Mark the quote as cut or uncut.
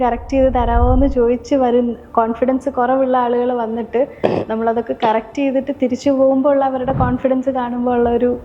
uncut